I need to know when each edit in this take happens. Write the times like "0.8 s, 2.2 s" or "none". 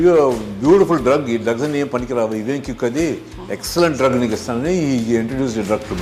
none